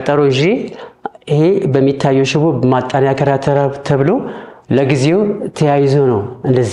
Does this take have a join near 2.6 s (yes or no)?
no